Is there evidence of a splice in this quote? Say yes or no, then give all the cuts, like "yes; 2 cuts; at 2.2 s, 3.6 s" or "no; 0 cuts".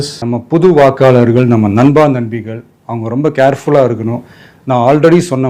no; 0 cuts